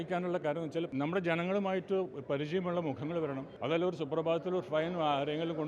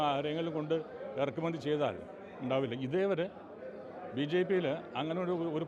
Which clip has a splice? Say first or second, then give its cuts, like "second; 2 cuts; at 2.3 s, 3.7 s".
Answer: first; 2 cuts; at 0.9 s, 3.5 s